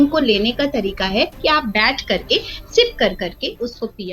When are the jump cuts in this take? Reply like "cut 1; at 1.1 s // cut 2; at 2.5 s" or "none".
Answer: none